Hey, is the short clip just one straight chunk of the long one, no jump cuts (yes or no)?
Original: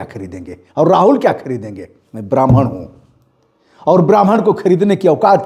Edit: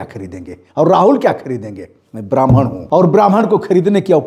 no